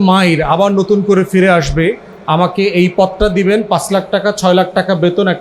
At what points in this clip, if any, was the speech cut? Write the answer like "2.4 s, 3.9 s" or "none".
2.1 s